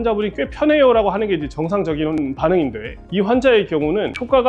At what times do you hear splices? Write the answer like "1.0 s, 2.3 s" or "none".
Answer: none